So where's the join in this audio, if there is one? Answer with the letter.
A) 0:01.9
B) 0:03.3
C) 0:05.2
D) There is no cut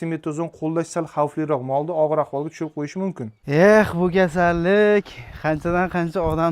B